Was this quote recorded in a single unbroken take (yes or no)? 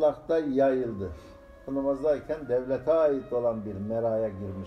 yes